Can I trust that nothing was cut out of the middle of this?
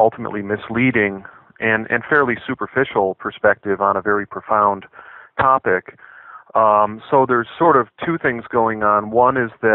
yes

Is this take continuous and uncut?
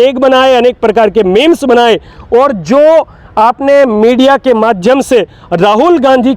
yes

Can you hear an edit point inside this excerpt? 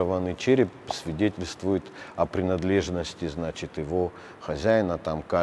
no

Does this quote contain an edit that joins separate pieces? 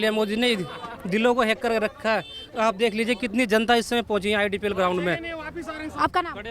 no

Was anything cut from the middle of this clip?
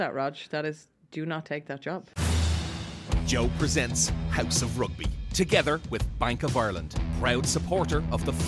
yes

